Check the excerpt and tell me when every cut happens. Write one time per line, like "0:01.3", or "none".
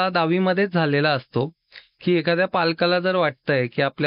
none